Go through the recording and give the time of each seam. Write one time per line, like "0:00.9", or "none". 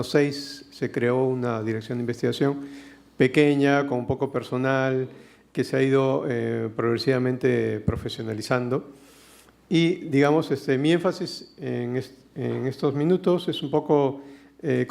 0:09.9